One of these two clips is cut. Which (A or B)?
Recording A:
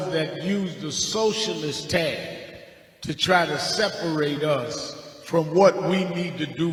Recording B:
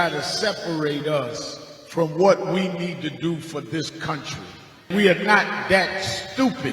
B